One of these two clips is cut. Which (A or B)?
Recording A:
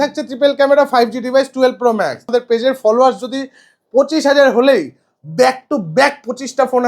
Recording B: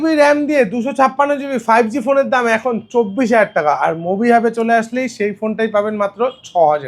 A